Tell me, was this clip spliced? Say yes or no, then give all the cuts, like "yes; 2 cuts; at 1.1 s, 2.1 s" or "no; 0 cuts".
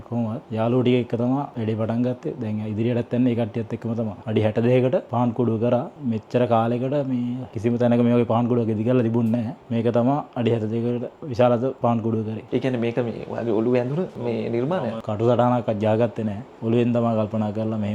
yes; 2 cuts; at 4.2 s, 12.4 s